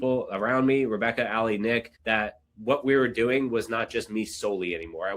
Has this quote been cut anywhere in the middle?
yes; 1 cut; at 1.9 s

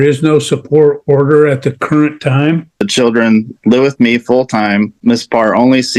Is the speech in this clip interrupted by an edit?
yes; 2 cuts; at 2.9 s, 5.0 s

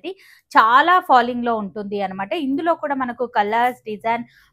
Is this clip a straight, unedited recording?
yes; 0 cuts

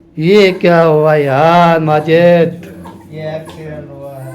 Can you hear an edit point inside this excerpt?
yes; 1 cut; at 3.0 s

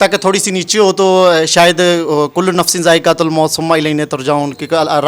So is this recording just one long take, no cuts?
yes; 0 cuts

